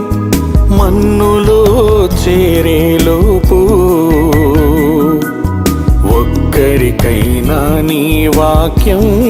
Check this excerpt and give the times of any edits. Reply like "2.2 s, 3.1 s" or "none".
none